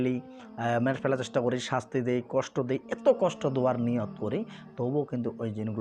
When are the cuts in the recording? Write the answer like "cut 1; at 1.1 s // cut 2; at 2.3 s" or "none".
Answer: none